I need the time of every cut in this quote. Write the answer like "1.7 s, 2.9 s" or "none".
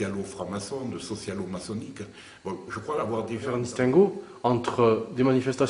3.4 s